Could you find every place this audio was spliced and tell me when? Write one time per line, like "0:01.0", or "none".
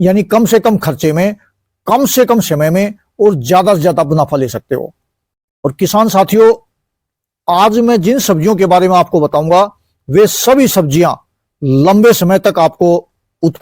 none